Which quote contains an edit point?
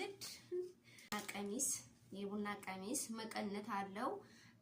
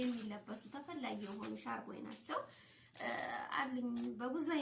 first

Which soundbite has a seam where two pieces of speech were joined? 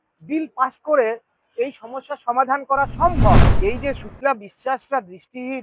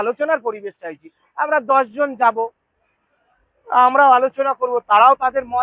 first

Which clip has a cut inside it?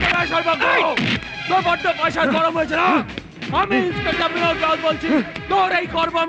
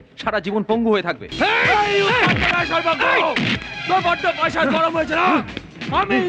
second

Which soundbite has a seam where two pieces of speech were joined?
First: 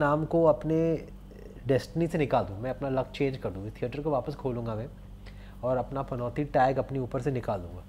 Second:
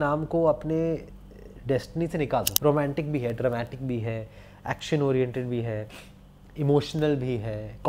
second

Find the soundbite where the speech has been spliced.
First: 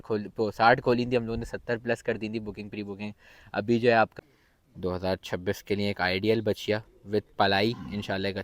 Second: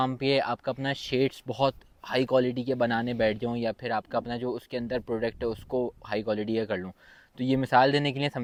first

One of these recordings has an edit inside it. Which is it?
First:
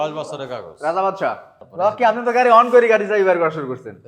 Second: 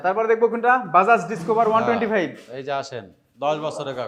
first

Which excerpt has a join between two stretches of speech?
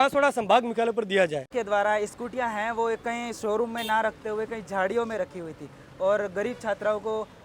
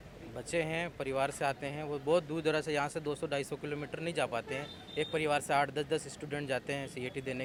first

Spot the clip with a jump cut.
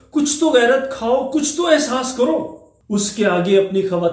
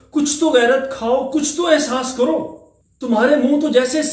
first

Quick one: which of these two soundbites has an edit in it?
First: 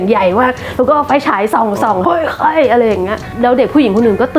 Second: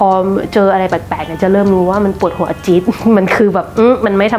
first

